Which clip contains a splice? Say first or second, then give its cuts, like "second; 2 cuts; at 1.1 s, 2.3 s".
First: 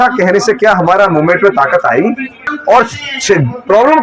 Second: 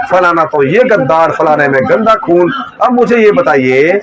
first; 1 cut; at 2.4 s